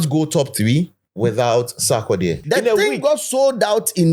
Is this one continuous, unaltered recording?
no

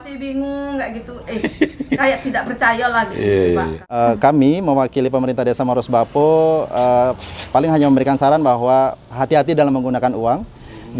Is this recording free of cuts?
no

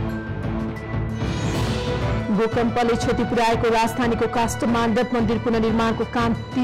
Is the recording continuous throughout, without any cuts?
yes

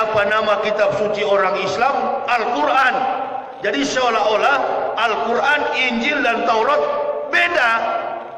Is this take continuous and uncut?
yes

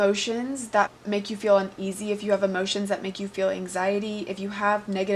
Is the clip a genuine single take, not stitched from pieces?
no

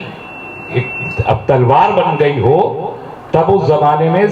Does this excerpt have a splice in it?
no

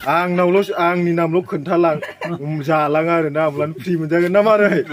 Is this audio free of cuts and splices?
yes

